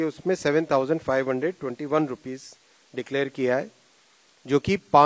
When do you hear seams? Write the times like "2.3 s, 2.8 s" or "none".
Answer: none